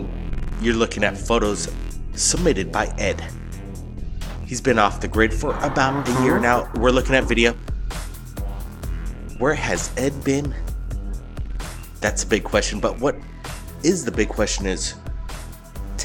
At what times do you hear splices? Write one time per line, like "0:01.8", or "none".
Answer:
0:05.3